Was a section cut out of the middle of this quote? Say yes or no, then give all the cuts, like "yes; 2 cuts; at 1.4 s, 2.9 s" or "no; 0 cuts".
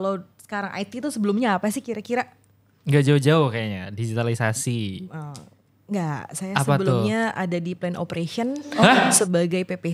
no; 0 cuts